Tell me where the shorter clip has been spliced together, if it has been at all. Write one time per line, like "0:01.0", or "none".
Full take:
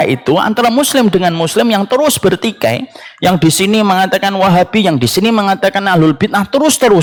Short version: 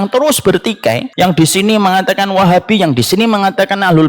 0:01.1